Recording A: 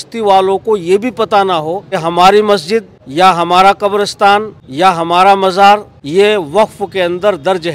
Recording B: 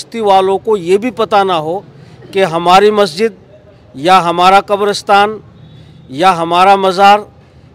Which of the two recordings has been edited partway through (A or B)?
A